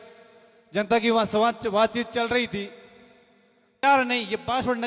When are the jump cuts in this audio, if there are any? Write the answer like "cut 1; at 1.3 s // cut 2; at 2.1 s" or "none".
cut 1; at 3.8 s